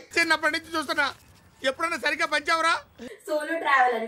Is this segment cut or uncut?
cut